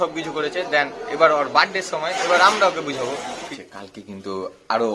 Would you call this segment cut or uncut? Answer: cut